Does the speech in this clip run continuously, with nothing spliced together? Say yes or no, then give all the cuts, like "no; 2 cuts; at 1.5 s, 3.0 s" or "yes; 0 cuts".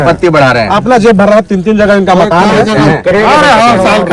no; 1 cut; at 3.0 s